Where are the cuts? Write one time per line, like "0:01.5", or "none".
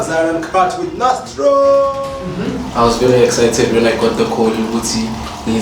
0:02.2